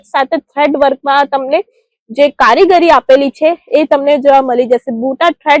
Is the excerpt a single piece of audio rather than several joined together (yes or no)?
yes